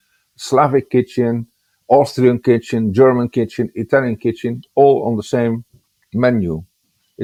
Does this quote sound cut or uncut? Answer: uncut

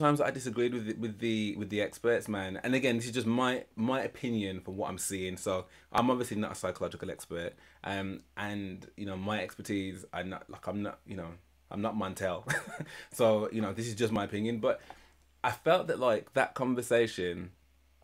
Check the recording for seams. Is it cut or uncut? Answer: uncut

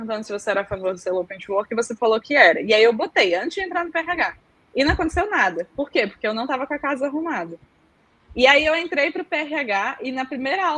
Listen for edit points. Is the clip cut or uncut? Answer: uncut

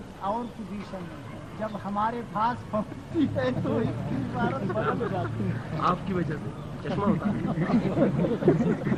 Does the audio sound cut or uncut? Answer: uncut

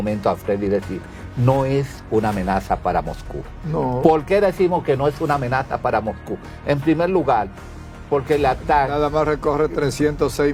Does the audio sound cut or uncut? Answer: uncut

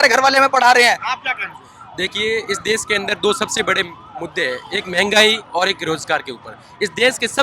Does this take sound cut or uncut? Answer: uncut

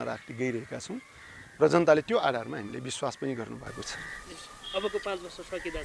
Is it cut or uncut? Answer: uncut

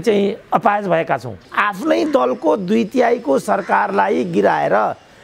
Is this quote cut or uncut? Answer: cut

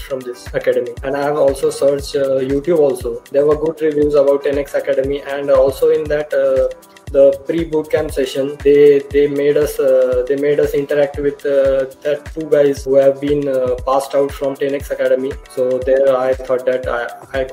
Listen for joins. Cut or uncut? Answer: uncut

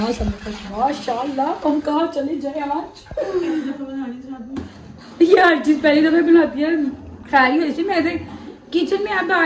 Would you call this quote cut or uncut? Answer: uncut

